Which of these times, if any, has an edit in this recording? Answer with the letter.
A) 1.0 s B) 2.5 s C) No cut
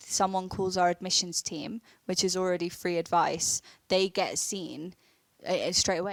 C